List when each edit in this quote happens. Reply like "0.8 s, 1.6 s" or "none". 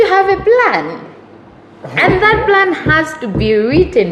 none